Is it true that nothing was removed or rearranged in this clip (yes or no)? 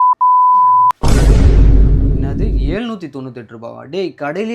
no